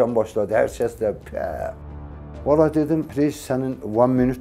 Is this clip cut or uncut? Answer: cut